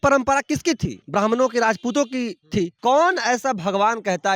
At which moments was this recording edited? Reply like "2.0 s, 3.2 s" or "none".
0.9 s, 2.7 s